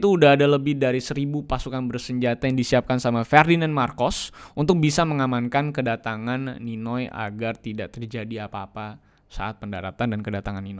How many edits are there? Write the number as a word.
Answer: zero